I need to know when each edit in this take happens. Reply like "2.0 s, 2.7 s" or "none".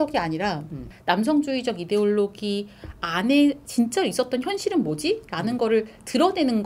none